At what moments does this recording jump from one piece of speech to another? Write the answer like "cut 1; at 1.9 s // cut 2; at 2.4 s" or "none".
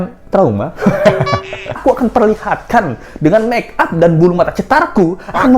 cut 1; at 1.8 s